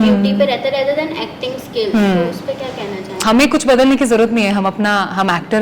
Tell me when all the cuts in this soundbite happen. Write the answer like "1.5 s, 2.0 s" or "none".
3.2 s